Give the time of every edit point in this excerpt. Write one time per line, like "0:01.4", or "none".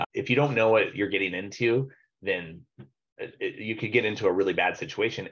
none